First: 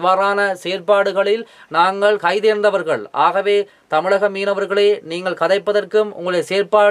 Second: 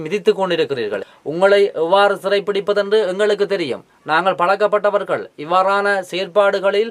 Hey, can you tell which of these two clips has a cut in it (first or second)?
second